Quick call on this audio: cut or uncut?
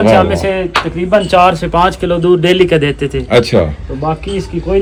uncut